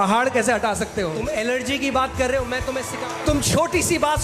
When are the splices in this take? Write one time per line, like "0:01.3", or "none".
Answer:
0:01.2
0:02.9